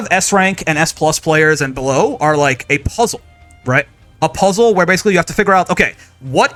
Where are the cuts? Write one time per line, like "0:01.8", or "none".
none